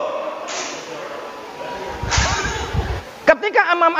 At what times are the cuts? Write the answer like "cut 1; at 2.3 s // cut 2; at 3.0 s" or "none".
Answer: cut 1; at 3.1 s